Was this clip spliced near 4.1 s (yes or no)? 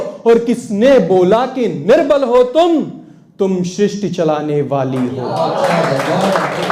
no